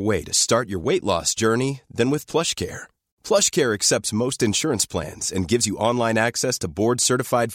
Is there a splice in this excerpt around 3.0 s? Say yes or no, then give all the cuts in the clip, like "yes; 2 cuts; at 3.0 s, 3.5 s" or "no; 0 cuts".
no; 0 cuts